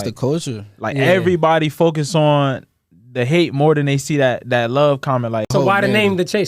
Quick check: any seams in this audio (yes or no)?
yes